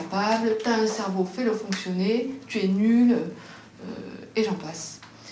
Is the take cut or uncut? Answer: uncut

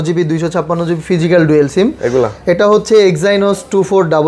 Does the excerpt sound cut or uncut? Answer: uncut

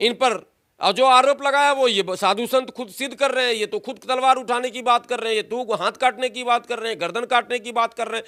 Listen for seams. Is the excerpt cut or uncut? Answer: uncut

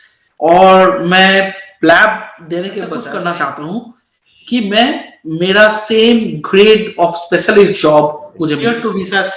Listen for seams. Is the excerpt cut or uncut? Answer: cut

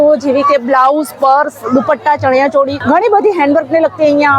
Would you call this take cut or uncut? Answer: cut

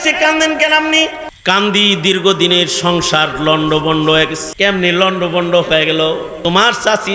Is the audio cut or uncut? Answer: cut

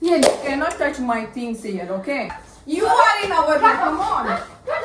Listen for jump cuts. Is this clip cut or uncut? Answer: cut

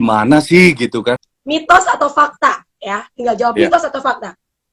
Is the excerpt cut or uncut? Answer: cut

